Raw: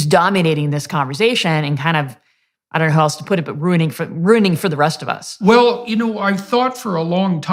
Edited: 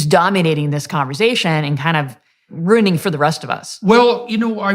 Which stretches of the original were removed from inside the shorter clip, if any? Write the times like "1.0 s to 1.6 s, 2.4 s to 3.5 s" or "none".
2.5 s to 4.1 s